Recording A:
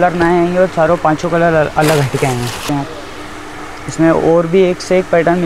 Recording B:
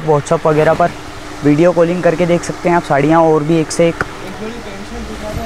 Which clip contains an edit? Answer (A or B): A